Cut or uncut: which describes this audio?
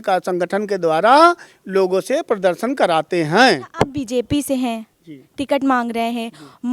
cut